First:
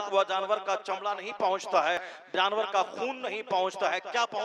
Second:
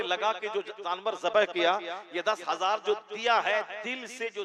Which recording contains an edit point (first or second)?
first